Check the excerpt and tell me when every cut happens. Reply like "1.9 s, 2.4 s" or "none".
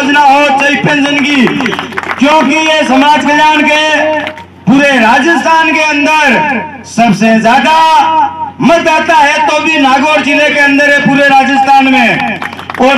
4.4 s